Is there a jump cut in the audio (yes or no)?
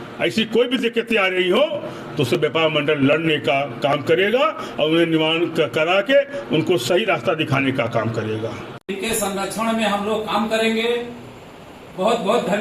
yes